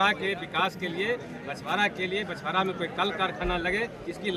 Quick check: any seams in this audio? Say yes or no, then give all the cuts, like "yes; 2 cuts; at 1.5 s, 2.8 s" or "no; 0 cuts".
no; 0 cuts